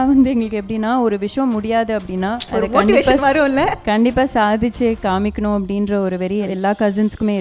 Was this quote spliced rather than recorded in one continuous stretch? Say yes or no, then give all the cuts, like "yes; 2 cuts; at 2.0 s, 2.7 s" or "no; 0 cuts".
yes; 2 cuts; at 2.4 s, 6.5 s